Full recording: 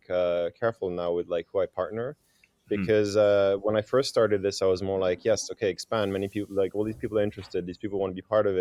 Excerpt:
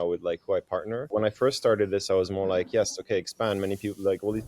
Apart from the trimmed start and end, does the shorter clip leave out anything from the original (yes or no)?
yes